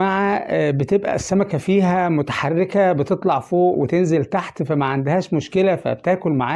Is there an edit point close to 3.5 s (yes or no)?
no